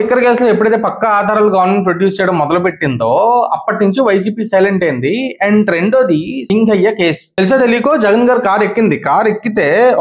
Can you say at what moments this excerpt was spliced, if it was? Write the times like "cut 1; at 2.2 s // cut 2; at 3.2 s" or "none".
cut 1; at 6.4 s // cut 2; at 7.3 s